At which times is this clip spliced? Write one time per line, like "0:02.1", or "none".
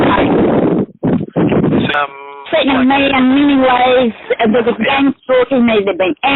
0:01.9